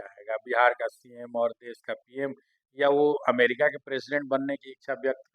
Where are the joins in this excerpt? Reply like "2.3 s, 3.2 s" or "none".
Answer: none